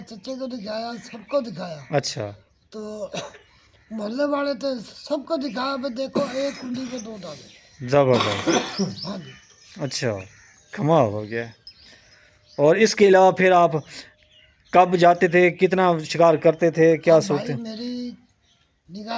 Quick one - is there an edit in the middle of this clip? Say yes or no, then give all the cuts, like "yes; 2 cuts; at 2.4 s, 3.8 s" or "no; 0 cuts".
no; 0 cuts